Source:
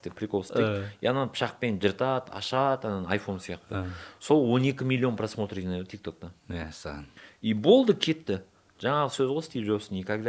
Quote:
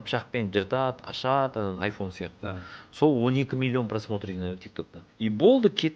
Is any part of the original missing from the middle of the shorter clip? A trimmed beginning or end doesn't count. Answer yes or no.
yes